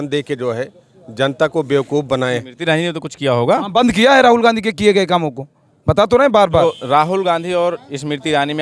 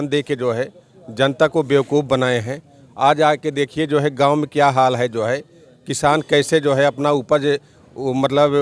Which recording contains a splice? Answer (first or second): first